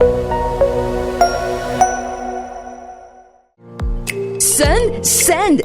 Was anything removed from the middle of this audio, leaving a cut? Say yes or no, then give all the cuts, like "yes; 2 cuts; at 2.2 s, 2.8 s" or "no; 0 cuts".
yes; 1 cut; at 3.5 s